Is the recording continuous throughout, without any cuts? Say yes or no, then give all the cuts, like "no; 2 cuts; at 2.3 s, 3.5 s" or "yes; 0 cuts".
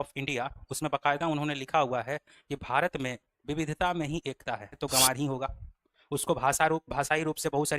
no; 1 cut; at 4.8 s